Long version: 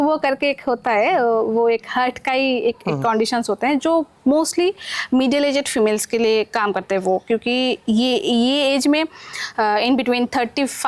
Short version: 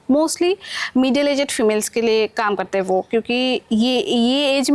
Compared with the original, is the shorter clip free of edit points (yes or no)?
yes